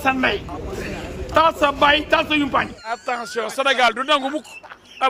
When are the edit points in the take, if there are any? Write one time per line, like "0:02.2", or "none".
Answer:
0:02.9